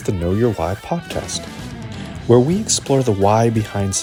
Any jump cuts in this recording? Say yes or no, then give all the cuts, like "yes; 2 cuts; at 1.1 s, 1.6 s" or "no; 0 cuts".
no; 0 cuts